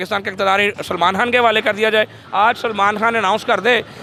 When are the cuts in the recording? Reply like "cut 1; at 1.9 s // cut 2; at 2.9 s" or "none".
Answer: none